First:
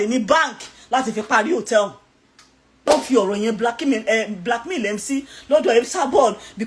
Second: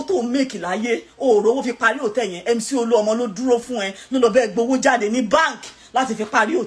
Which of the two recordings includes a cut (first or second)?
first